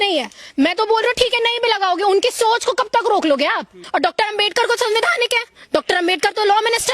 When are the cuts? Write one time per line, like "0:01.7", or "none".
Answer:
0:03.8